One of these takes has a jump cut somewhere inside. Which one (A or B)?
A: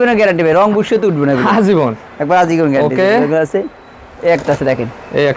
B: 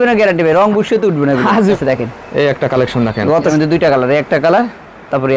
B